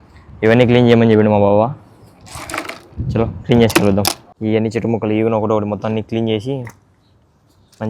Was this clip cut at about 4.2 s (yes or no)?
yes